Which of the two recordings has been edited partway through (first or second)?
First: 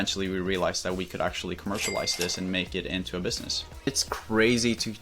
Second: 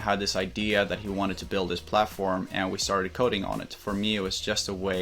first